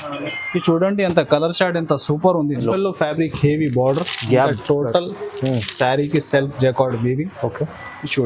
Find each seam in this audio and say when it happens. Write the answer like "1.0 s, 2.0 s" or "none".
2.6 s